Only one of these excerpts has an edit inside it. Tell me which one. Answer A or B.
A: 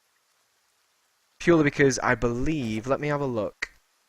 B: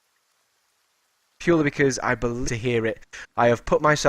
A